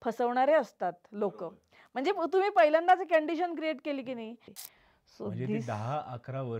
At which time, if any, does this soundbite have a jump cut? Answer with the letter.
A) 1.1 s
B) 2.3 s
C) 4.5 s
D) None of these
C